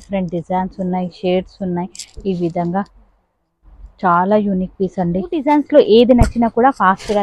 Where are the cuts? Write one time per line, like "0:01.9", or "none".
0:05.4